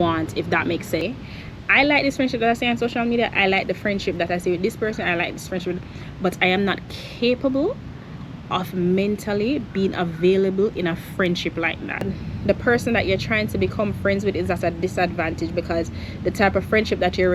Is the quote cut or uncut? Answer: cut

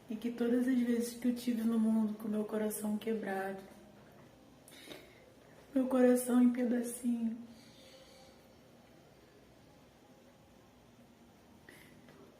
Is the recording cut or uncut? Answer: cut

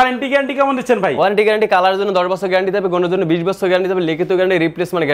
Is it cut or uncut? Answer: uncut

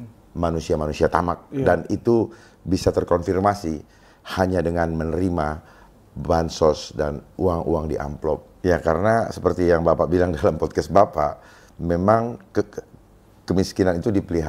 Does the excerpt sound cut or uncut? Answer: cut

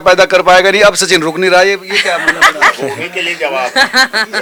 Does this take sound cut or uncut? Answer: uncut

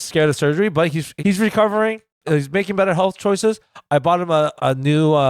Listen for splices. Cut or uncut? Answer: cut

